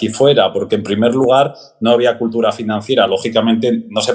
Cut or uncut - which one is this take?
uncut